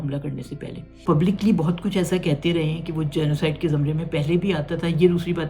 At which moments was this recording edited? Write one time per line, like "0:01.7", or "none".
0:00.9

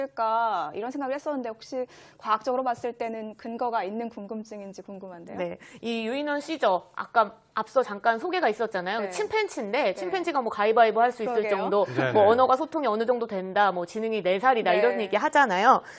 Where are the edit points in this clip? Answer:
0:12.7

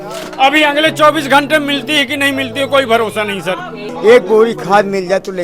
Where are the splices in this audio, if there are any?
0:03.8

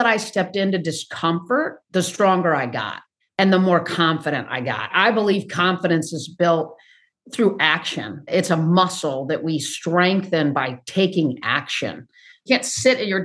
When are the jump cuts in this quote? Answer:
0:01.8
0:12.4

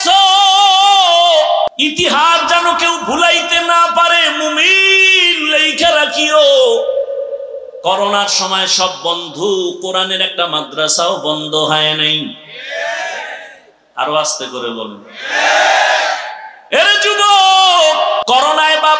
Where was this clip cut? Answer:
0:01.7
0:18.2

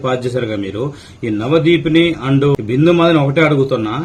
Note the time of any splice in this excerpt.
0:02.5

